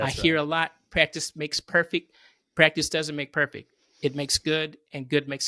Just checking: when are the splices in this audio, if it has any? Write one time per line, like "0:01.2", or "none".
none